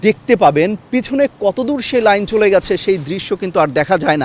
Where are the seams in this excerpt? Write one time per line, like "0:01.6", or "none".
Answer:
none